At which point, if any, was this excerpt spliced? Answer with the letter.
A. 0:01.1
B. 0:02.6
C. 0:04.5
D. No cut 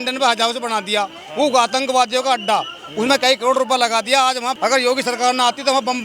C